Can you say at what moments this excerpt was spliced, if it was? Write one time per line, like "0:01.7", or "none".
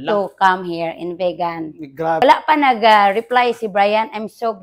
0:02.2

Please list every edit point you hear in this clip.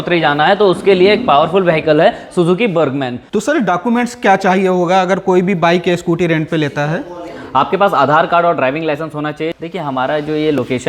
0:03.3
0:09.4

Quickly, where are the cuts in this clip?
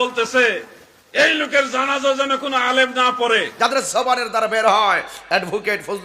0:03.5

